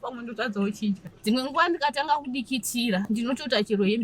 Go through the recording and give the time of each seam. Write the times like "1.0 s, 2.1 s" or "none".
1.1 s, 3.1 s